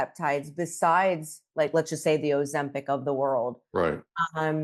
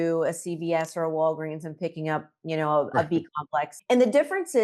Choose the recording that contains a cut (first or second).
second